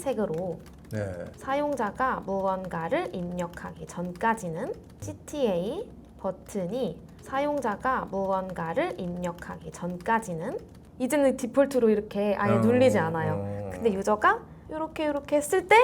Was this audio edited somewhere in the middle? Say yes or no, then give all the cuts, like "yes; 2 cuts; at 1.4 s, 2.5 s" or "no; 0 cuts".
yes; 3 cuts; at 5.0 s, 7.1 s, 10.8 s